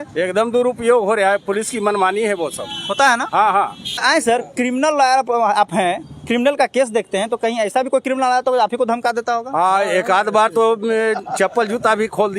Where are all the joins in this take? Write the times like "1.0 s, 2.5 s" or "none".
4.0 s